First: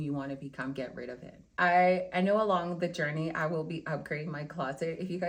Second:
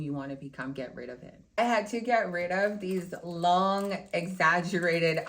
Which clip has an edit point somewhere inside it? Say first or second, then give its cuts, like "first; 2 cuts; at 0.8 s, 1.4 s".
second; 1 cut; at 1.6 s